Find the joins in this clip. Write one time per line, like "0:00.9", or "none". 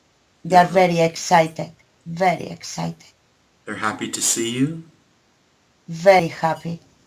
0:02.6